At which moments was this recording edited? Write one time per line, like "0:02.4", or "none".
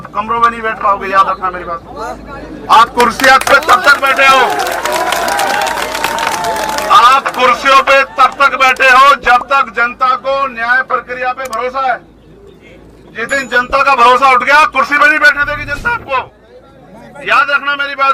none